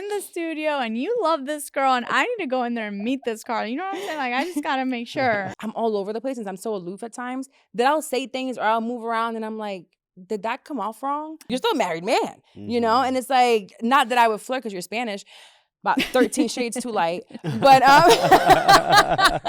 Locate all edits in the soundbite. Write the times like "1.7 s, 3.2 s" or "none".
5.6 s, 11.4 s